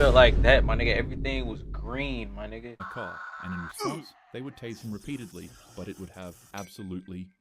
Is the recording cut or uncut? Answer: cut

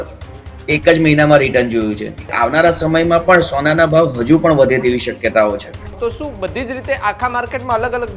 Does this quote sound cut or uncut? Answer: cut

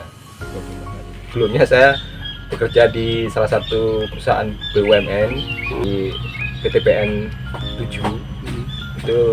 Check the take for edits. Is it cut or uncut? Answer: cut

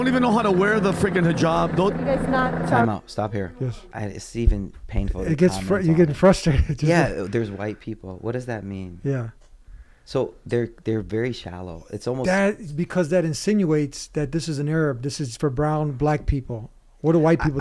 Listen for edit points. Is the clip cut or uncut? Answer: uncut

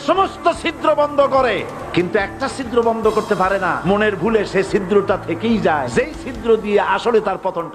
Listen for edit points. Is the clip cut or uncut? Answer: cut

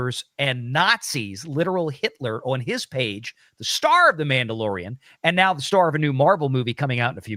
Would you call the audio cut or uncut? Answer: uncut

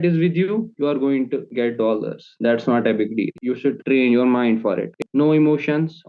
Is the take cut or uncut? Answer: cut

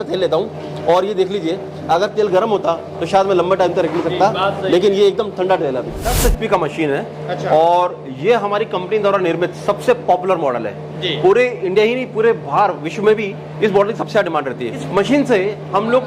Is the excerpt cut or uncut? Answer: cut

